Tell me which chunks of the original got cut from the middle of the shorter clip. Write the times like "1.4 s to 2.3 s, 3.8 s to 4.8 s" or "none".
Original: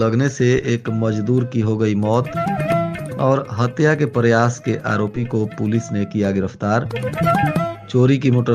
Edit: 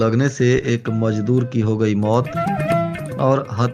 none